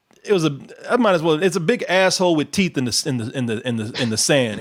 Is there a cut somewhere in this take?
no; 0 cuts

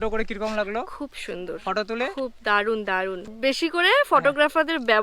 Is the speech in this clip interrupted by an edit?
yes; 1 cut; at 3.3 s

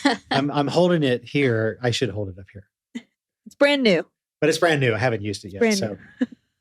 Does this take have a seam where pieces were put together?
no; 0 cuts

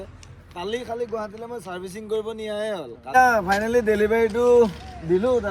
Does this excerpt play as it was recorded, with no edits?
no; 1 cut; at 3.0 s

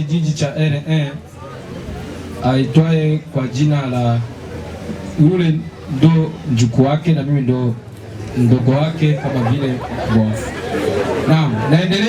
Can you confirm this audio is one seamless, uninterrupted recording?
yes; 0 cuts

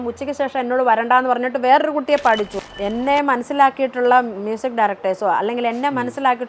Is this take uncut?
no; 1 cut; at 2.5 s

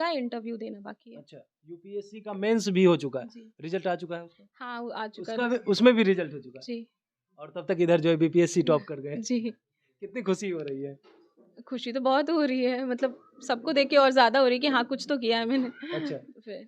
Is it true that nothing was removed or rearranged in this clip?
yes; 0 cuts

